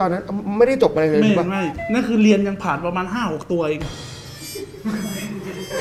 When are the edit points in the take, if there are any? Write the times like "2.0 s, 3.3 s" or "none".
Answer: none

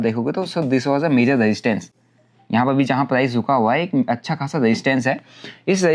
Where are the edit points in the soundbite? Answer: none

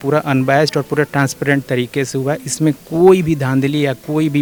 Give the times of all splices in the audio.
none

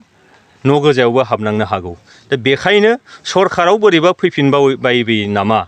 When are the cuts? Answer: none

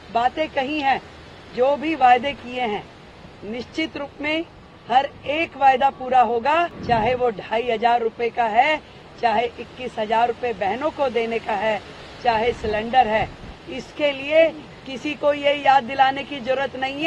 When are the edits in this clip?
6.8 s

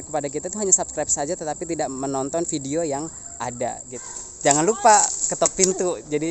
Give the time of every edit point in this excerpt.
4.0 s

